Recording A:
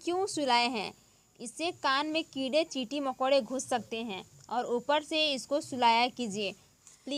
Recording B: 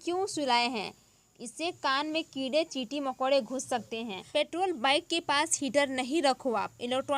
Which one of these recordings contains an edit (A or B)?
B